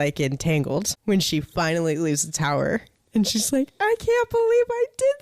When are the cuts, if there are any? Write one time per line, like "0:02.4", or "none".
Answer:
0:00.9